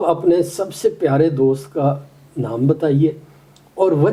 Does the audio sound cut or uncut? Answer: uncut